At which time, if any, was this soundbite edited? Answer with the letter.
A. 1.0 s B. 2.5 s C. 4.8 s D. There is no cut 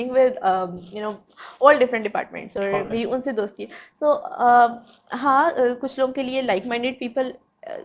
D